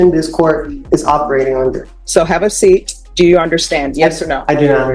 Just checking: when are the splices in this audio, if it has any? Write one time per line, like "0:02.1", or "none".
0:01.9
0:03.0